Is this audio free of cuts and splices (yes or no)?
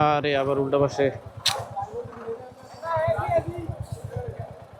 yes